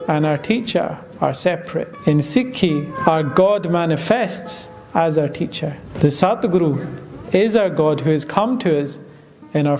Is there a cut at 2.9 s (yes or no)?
yes